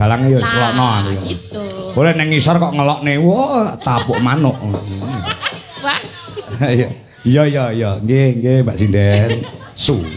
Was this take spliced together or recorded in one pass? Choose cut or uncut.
uncut